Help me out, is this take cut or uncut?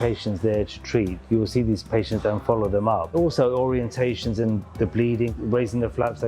cut